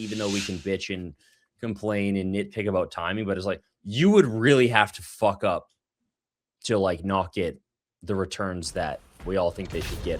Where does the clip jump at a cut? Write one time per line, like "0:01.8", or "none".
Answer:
none